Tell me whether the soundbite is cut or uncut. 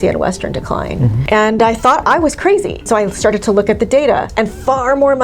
cut